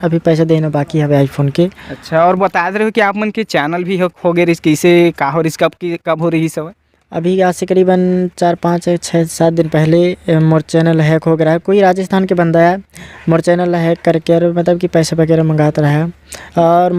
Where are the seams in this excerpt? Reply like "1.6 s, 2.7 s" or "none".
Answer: none